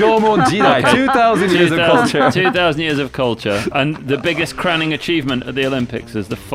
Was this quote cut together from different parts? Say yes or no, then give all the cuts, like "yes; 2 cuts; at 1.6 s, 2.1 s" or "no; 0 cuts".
yes; 1 cut; at 3.7 s